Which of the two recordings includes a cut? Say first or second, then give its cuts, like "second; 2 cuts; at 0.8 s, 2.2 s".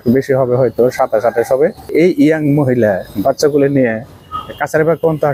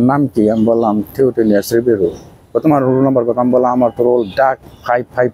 first; 1 cut; at 1.9 s